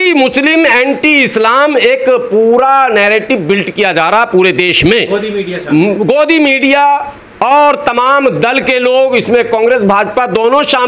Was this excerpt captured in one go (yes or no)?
yes